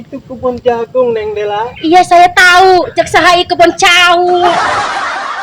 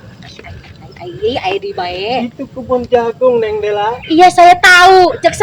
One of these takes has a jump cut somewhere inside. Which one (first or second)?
first